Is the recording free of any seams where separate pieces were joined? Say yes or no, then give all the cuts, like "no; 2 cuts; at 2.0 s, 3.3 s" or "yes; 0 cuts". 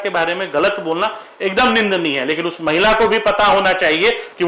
yes; 0 cuts